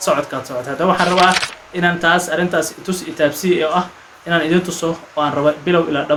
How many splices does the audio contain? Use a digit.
0